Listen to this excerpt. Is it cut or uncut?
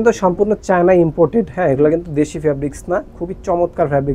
uncut